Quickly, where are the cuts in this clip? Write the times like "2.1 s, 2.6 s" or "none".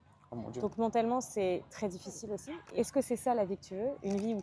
2.5 s